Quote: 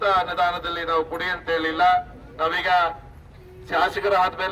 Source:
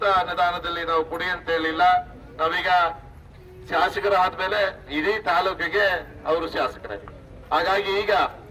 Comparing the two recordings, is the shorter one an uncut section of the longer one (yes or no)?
yes